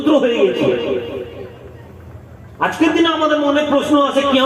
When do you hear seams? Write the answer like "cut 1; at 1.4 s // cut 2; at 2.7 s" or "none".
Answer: none